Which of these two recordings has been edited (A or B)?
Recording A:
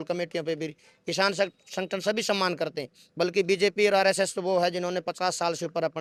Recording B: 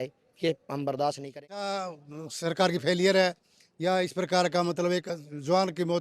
B